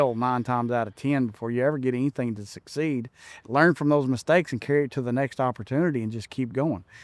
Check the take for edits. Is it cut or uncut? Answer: uncut